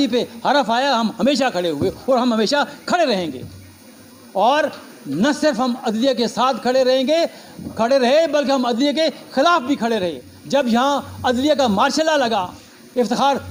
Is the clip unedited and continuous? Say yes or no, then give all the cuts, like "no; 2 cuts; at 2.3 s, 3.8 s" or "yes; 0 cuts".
yes; 0 cuts